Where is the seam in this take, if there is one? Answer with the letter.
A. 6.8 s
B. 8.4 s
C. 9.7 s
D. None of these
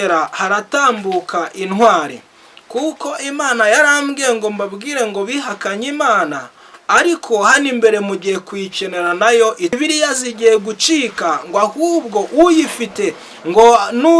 C